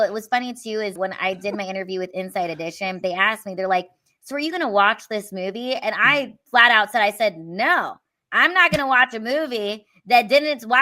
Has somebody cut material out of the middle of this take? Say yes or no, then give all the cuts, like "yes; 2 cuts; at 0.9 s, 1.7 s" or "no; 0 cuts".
yes; 1 cut; at 1.0 s